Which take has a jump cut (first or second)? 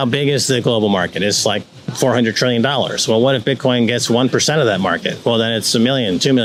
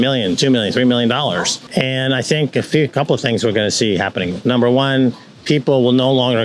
second